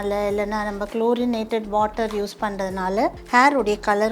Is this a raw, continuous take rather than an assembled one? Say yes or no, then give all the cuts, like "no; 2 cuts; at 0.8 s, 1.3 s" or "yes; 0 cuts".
no; 1 cut; at 3.2 s